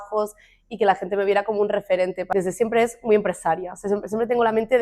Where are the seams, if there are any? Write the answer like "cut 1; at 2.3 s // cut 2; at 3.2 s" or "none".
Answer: cut 1; at 2.3 s